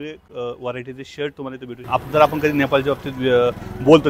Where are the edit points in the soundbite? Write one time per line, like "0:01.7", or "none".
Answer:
0:01.8

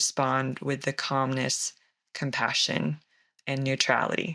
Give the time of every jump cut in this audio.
0:03.3

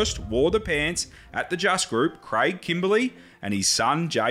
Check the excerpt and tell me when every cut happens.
none

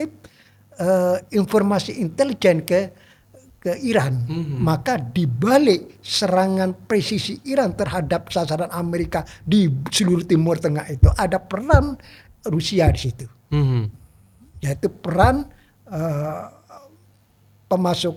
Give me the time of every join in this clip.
none

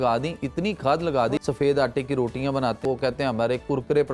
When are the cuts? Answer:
0:01.4
0:02.8

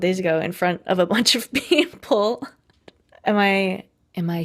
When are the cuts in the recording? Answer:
0:02.9

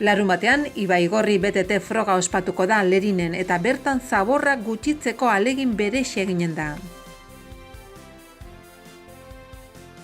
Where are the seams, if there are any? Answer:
0:06.9
0:09.0

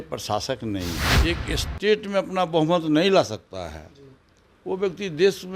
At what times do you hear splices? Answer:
0:01.1

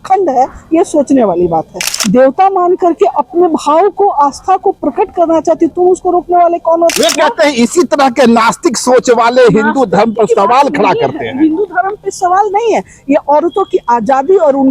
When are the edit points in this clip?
0:01.9
0:06.9

